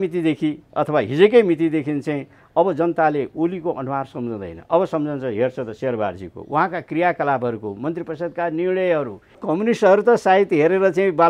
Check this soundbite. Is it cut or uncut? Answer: cut